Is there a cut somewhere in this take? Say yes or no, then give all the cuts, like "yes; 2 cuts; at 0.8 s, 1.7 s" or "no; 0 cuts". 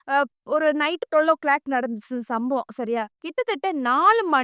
no; 0 cuts